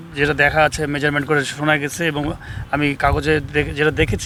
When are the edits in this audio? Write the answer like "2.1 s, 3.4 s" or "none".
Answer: none